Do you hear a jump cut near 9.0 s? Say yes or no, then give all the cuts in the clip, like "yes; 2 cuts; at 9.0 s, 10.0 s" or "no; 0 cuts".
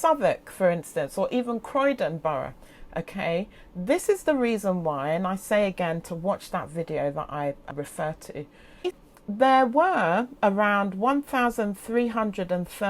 yes; 1 cut; at 9.0 s